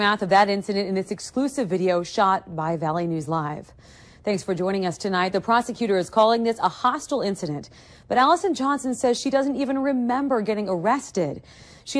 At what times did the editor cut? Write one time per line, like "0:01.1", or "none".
0:05.7